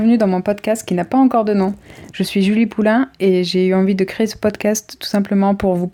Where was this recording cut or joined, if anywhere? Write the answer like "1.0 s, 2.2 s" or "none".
none